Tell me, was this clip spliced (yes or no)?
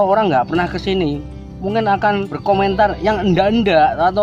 yes